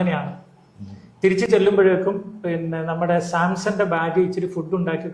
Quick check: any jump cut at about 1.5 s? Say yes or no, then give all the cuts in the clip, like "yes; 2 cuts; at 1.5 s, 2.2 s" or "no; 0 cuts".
no; 0 cuts